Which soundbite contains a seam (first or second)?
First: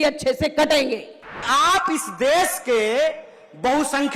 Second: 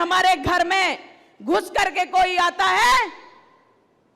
first